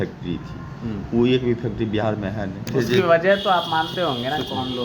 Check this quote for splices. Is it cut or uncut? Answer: cut